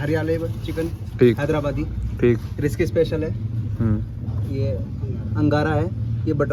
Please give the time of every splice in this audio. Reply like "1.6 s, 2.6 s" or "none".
none